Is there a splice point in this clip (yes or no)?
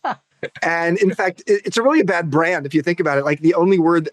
no